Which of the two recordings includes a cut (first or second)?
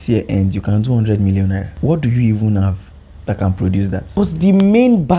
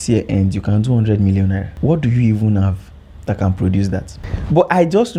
first